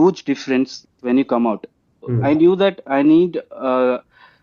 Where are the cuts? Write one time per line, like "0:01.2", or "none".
0:02.1